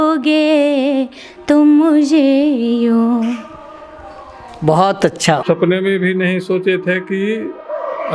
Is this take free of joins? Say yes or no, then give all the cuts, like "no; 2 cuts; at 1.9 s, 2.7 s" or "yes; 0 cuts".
no; 1 cut; at 5.4 s